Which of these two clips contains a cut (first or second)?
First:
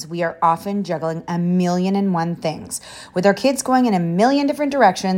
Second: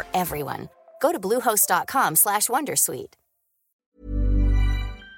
second